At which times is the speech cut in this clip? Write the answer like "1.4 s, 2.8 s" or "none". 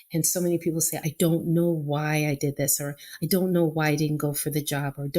1.0 s